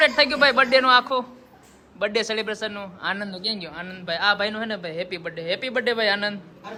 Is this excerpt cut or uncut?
uncut